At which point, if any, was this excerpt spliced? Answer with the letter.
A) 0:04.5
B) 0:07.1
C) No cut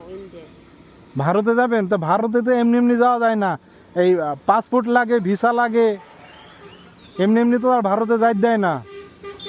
C